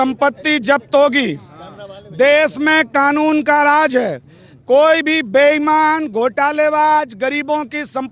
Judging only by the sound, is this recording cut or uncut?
uncut